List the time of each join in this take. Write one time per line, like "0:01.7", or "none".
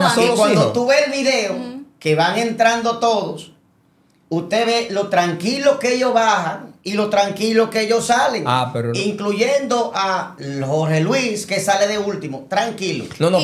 none